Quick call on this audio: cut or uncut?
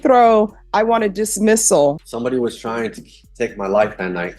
cut